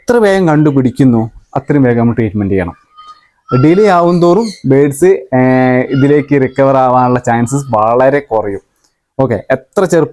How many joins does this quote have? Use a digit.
0